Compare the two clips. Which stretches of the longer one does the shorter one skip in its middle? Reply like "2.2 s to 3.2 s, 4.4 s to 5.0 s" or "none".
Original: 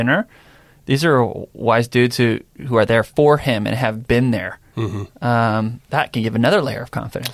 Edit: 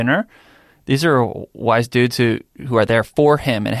none